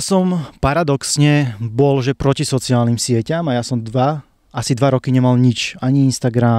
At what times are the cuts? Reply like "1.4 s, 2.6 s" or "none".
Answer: none